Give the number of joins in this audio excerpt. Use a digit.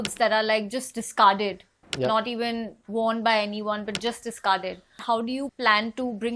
1